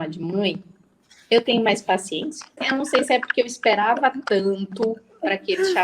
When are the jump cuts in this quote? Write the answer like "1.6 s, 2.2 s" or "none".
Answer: 2.6 s